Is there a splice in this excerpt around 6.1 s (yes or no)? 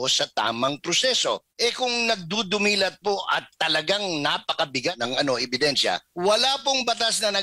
yes